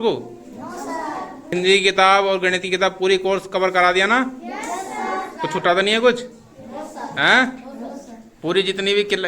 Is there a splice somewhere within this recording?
yes; 1 cut; at 1.5 s

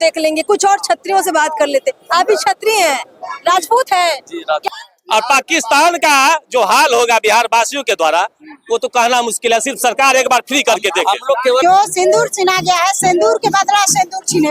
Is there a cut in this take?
yes; 2 cuts; at 4.6 s, 11.4 s

